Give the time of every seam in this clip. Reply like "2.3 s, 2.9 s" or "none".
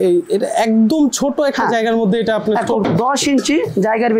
2.8 s